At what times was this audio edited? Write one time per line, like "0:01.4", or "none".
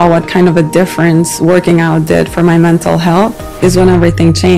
none

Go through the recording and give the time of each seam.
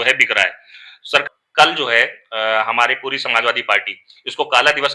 0:01.2

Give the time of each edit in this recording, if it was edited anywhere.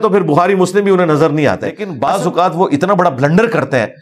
0:01.9

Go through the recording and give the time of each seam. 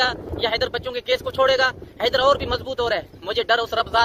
none

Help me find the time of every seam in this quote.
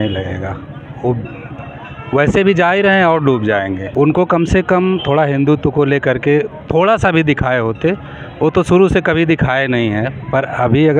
0:03.8

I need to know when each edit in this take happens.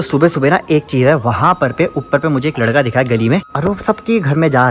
0:03.5

